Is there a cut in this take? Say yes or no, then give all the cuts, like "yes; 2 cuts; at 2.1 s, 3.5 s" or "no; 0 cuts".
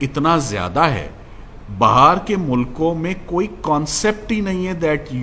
no; 0 cuts